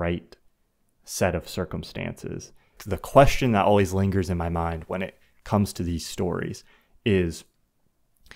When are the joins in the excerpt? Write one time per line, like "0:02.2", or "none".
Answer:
0:02.8